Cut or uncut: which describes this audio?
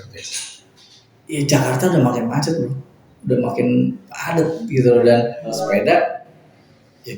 cut